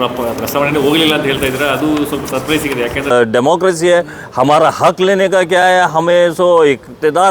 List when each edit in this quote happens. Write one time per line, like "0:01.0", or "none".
0:03.1